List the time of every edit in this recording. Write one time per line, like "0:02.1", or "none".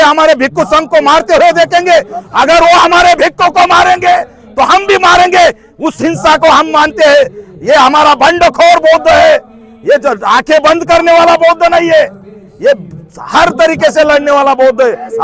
none